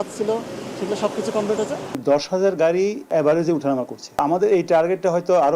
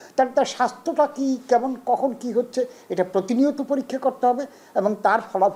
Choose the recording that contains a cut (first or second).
first